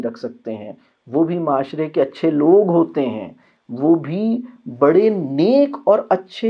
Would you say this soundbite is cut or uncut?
uncut